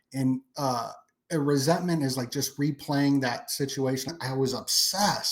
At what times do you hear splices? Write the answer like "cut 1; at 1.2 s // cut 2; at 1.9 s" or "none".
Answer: cut 1; at 4.1 s